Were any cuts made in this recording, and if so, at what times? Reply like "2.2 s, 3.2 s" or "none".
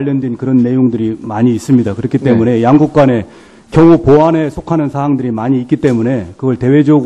5.9 s